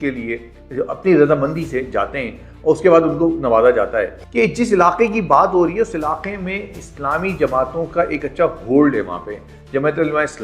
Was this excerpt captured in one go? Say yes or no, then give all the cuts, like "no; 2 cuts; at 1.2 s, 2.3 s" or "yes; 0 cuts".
no; 1 cut; at 4.2 s